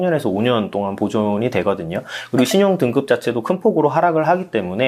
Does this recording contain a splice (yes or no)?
no